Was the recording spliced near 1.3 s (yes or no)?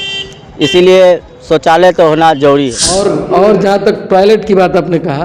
no